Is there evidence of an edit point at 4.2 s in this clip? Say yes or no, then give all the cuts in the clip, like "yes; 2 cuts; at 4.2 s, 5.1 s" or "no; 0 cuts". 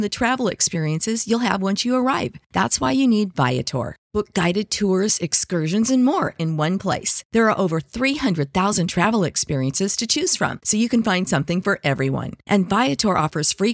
no; 0 cuts